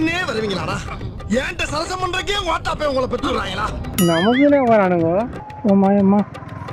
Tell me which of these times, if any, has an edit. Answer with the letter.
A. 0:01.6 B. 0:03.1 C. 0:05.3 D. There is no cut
C